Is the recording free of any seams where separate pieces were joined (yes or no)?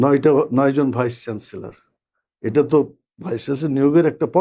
yes